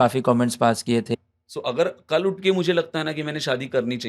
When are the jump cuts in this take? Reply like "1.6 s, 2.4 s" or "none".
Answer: 1.1 s